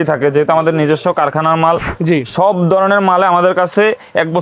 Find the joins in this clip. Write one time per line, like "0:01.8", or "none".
0:01.9